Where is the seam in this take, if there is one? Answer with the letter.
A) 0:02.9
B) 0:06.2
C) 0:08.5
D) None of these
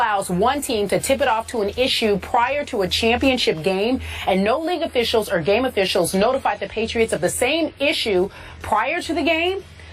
A